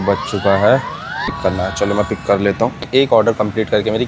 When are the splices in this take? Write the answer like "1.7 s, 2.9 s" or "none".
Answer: 1.3 s, 2.9 s